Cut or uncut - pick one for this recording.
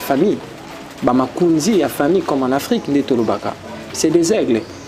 uncut